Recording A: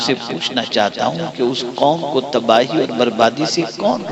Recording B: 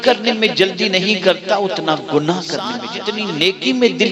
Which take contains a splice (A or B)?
B